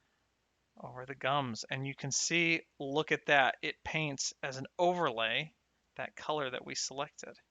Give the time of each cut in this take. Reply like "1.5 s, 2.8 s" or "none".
none

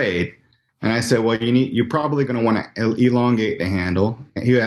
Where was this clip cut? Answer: none

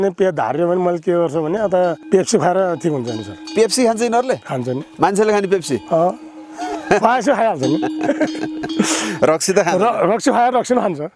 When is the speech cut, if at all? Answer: 2.0 s

